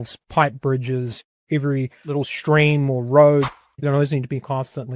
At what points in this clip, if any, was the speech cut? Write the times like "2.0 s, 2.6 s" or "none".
1.3 s, 2.0 s, 3.6 s